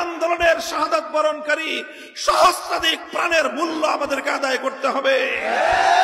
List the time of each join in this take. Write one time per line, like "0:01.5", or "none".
none